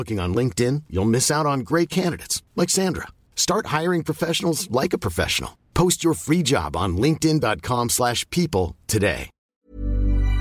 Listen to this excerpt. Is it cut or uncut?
cut